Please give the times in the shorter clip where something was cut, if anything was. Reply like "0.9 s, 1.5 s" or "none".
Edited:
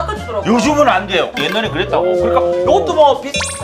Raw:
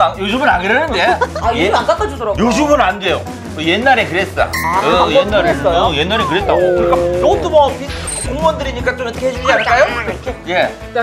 1.5 s